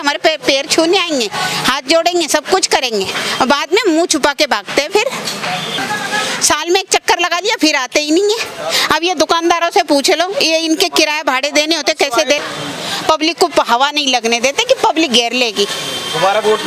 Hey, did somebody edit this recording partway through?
yes; 2 cuts; at 5.8 s, 12.4 s

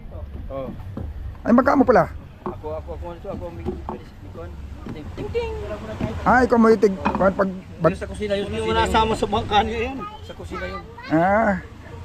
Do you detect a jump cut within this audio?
no; 0 cuts

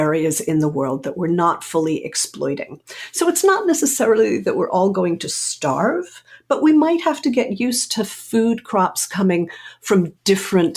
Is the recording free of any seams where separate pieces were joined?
yes; 0 cuts

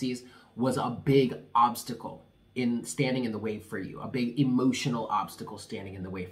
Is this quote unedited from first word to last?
yes; 0 cuts

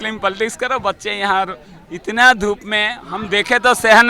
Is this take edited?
no; 0 cuts

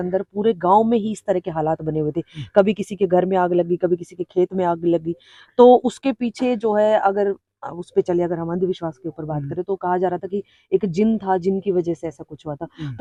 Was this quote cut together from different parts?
no; 0 cuts

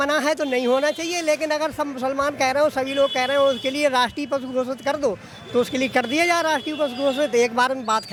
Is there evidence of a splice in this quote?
no; 0 cuts

